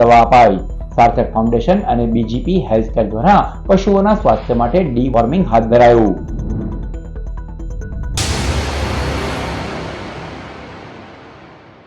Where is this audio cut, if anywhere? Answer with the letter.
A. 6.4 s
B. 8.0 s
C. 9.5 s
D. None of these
B